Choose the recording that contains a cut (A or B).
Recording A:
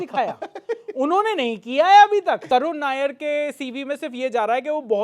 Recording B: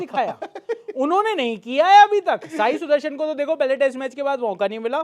A